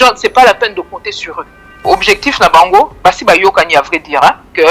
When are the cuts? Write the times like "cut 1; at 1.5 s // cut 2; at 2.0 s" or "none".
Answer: cut 1; at 1.7 s